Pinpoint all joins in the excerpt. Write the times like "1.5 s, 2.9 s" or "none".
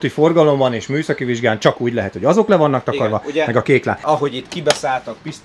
4.0 s

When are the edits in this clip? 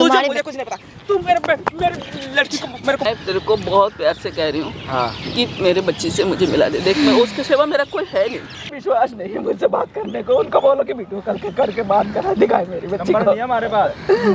3.0 s, 8.7 s

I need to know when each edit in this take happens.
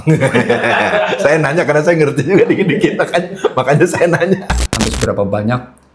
4.7 s

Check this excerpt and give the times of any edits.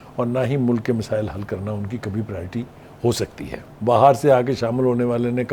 3.6 s

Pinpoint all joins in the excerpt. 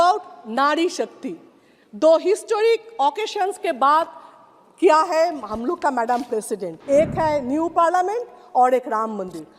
6.7 s

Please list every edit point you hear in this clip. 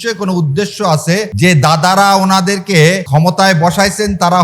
1.3 s, 3.0 s

